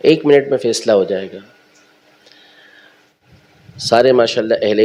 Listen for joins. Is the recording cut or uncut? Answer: uncut